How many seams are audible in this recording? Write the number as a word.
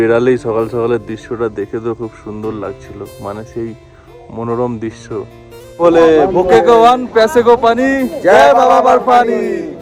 one